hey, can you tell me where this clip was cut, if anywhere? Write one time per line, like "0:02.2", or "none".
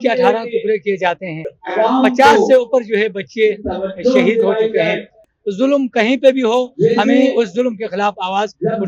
0:01.6
0:05.3